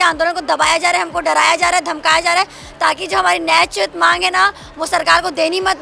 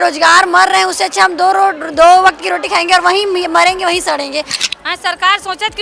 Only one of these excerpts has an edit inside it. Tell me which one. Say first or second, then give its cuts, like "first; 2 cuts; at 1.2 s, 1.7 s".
second; 1 cut; at 4.6 s